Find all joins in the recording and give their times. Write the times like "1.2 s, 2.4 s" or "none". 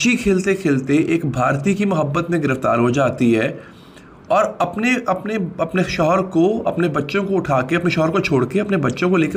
none